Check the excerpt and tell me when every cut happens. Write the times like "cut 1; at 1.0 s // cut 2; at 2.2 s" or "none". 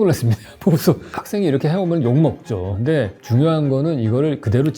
cut 1; at 1.2 s // cut 2; at 3.0 s

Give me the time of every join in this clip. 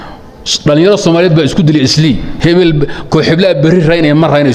cut 1; at 2.3 s

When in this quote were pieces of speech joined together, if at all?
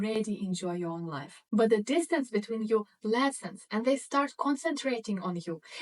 cut 1; at 1.5 s

